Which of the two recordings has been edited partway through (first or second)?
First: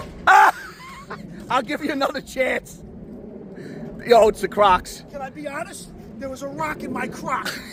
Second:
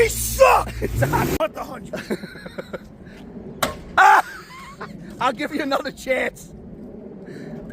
second